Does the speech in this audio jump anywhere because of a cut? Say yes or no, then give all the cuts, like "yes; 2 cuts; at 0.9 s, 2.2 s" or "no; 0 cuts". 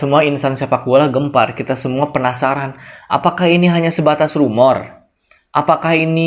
no; 0 cuts